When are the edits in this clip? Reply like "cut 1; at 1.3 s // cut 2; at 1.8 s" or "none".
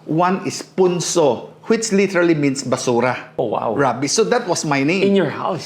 cut 1; at 3.2 s